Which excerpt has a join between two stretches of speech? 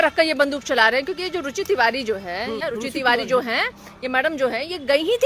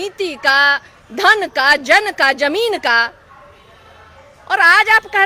first; 1 cut; at 2.6 s

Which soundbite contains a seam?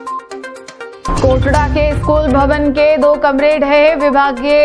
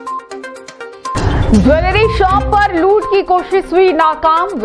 second; 1 cut; at 1.1 s

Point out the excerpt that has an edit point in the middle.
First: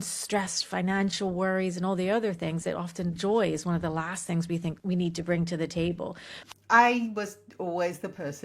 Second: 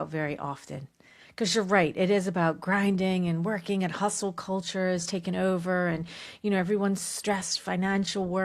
first; 2 cuts; at 4.8 s, 6.3 s

